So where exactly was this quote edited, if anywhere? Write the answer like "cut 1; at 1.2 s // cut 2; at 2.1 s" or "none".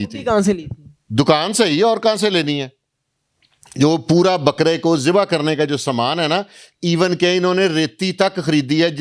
none